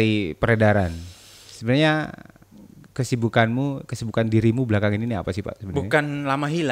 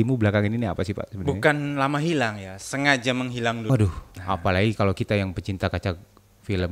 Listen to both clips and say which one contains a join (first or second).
second